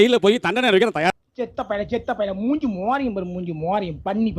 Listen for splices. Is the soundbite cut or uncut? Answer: cut